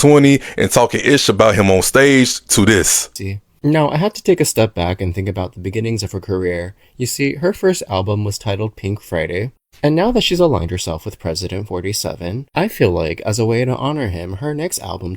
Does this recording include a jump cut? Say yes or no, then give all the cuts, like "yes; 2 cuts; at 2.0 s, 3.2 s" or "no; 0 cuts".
yes; 1 cut; at 3.0 s